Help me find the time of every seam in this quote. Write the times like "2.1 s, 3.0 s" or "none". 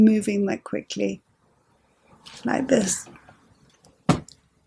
none